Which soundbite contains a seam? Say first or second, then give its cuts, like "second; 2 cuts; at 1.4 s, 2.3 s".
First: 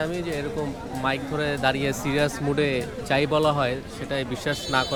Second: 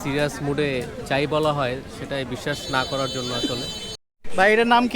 second; 1 cut; at 4.0 s